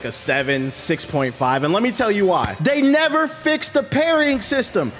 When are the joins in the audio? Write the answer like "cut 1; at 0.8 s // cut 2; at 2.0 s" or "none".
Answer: cut 1; at 2.5 s